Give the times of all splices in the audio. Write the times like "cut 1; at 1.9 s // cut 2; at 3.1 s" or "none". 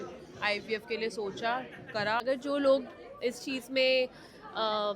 cut 1; at 2.2 s